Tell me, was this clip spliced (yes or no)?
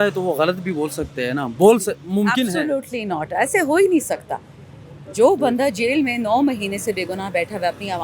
no